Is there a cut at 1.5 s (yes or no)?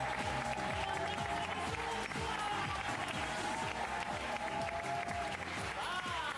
yes